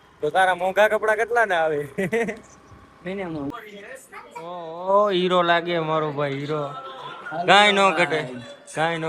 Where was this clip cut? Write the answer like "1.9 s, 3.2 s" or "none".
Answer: 3.5 s